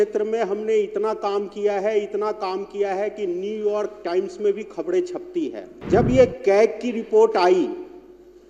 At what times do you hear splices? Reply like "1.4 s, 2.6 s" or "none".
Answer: 5.7 s